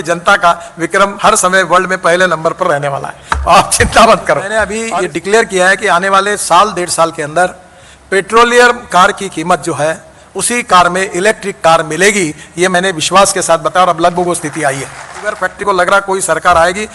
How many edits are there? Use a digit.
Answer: 2